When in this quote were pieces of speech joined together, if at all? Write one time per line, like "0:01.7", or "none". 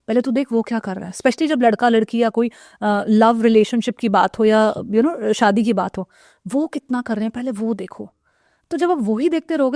none